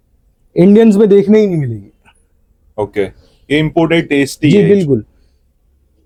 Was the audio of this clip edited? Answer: no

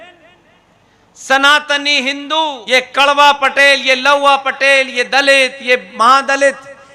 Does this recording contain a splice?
yes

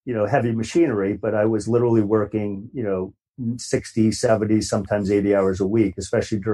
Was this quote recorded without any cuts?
no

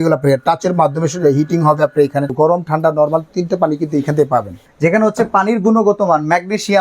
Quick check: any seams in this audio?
yes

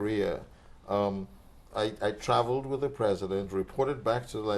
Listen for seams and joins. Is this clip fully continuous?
yes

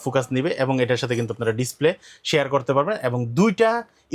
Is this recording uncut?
yes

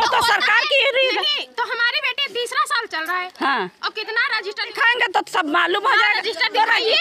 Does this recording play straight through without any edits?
no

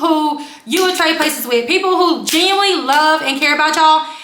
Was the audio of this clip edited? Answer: no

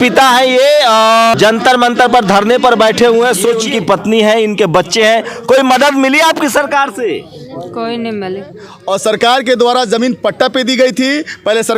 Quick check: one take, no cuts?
no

